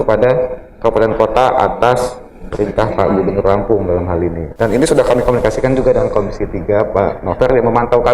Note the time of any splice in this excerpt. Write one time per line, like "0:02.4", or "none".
none

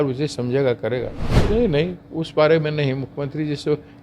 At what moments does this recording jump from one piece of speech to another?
0:01.3

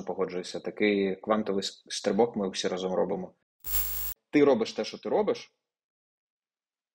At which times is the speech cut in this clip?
0:03.9

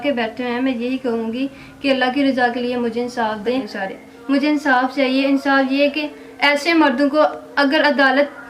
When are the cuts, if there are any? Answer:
0:03.7

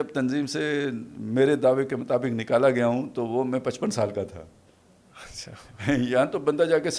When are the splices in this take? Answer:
none

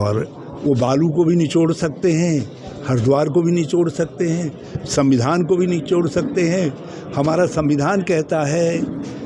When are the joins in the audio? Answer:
none

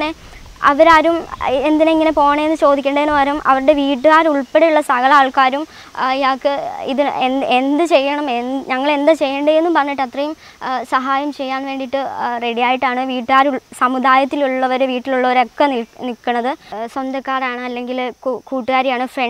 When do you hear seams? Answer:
0:16.7

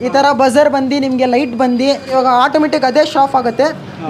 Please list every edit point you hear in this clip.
0:02.1

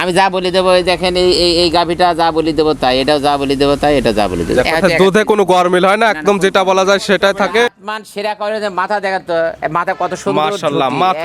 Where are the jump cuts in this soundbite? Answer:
0:07.8

